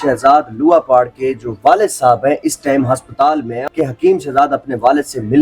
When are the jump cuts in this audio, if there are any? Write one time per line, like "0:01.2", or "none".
0:03.5